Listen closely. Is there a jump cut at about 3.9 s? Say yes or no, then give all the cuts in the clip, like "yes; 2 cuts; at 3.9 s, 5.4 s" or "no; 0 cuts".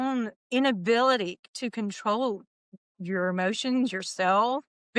no; 0 cuts